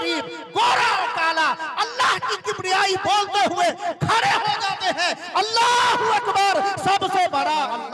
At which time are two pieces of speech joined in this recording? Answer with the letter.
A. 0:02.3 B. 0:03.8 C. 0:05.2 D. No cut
D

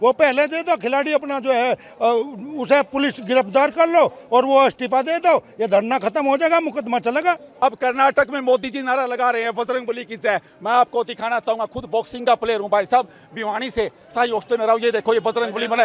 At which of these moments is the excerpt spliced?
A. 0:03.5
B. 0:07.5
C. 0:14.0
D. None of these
B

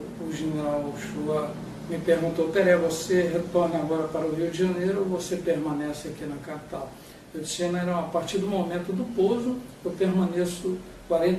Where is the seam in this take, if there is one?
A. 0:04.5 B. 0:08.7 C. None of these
B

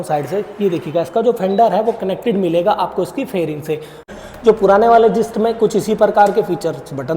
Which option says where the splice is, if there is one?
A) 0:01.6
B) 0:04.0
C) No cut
B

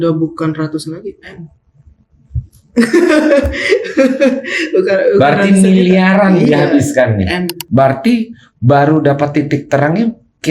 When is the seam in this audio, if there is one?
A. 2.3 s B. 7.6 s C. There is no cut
B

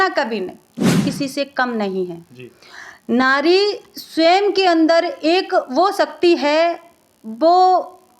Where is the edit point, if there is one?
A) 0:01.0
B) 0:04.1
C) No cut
A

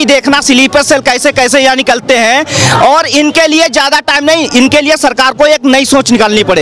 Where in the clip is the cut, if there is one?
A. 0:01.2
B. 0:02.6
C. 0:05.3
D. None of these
D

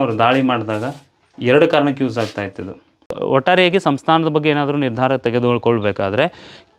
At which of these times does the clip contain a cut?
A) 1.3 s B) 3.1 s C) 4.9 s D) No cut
B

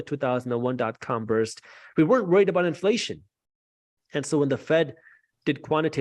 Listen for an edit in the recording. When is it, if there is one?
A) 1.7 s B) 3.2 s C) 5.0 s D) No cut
D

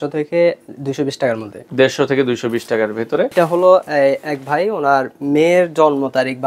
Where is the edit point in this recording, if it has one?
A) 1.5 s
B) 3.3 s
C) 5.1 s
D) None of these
B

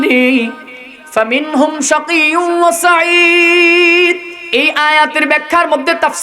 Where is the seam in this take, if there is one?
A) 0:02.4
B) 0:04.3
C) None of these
B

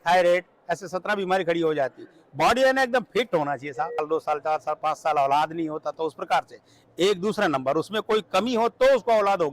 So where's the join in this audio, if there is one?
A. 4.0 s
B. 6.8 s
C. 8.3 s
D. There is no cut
A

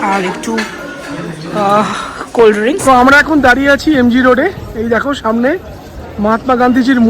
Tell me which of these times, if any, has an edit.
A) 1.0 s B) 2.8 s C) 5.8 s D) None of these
B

